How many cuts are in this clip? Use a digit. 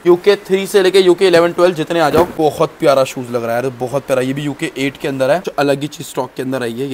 2